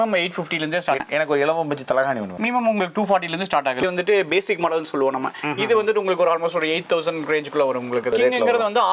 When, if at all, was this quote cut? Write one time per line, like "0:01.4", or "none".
0:01.0
0:03.8
0:08.1